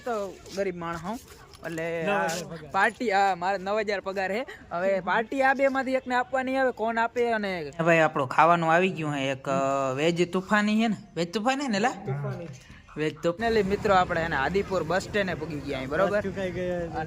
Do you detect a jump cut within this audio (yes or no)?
yes